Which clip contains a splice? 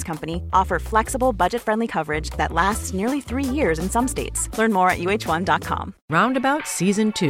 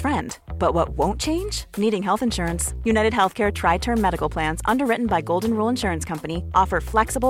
first; 1 cut; at 5.9 s

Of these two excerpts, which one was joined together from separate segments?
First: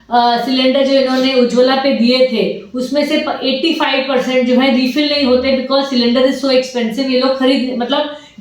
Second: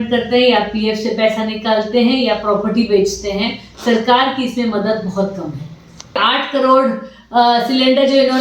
second; 1 cut; at 6.2 s

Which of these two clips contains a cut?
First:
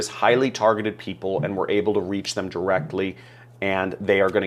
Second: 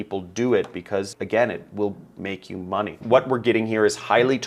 second; 1 cut; at 2.9 s

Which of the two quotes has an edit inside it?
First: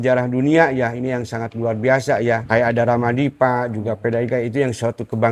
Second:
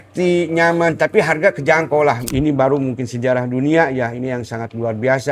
second; 1 cut; at 2.3 s

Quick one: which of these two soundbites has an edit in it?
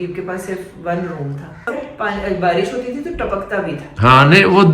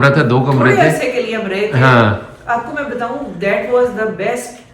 first; 1 cut; at 1.9 s

